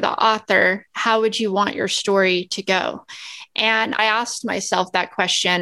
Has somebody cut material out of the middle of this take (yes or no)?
yes